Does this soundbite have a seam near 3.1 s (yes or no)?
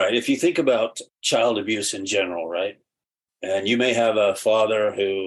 no